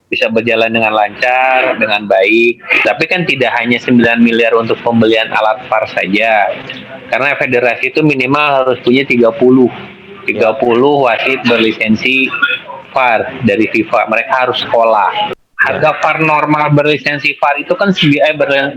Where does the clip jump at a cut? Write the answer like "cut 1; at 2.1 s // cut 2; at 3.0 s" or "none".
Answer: cut 1; at 2.8 s // cut 2; at 15.3 s